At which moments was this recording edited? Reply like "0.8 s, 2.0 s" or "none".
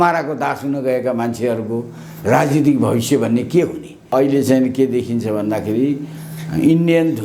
4.1 s